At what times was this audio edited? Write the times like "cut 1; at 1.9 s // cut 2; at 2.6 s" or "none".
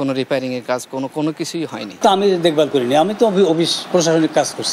none